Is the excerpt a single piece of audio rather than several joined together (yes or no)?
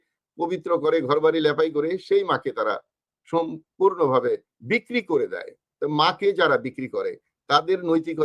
yes